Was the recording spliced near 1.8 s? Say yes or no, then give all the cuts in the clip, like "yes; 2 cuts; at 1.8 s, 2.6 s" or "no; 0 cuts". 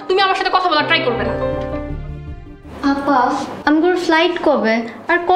yes; 1 cut; at 1.8 s